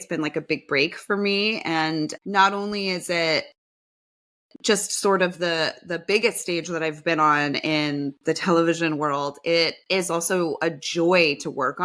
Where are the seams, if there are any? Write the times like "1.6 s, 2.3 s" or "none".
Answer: none